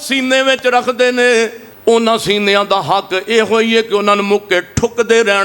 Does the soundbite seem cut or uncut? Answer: cut